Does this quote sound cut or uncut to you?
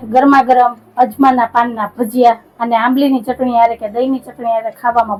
uncut